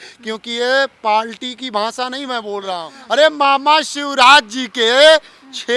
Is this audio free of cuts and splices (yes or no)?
no